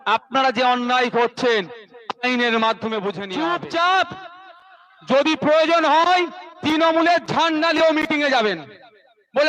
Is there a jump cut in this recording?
yes; 1 cut; at 3.2 s

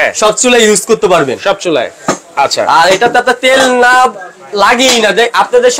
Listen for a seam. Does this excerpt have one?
no; 0 cuts

